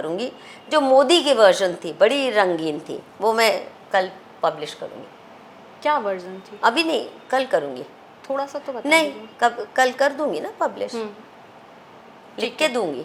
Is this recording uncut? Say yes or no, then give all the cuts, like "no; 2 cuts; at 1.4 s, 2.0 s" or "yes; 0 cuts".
yes; 0 cuts